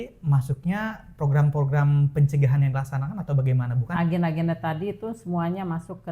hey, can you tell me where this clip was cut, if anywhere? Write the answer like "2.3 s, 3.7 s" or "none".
3.9 s